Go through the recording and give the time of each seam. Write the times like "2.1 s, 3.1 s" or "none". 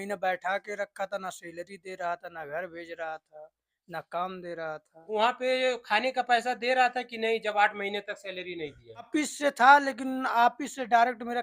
5.1 s, 9.1 s